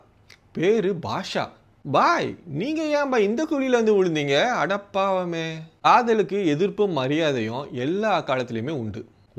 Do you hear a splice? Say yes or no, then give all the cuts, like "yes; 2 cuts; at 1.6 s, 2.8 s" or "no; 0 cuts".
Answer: yes; 1 cut; at 5.7 s